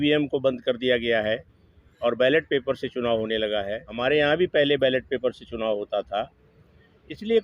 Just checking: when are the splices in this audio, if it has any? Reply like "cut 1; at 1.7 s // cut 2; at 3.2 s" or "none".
cut 1; at 3.8 s